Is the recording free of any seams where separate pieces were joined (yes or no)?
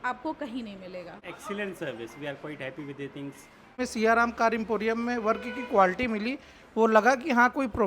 no